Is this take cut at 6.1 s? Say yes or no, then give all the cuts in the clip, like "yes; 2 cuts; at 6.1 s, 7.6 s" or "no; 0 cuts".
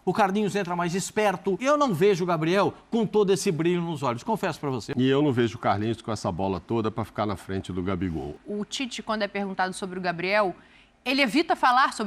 no; 3 cuts; at 1.6 s, 4.8 s, 8.4 s